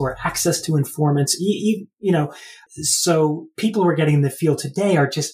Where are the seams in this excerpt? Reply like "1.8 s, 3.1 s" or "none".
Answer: 2.6 s